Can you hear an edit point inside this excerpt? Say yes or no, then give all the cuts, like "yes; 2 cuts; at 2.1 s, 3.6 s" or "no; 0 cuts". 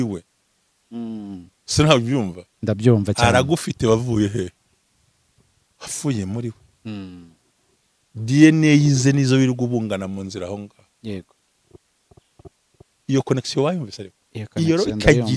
no; 0 cuts